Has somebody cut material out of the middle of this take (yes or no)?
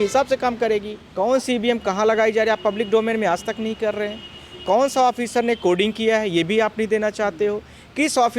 yes